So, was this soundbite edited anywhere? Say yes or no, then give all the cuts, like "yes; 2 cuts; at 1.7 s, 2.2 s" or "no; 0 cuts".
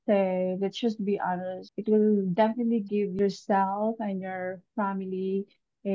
yes; 1 cut; at 3.1 s